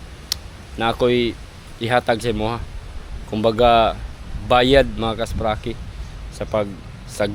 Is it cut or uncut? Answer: uncut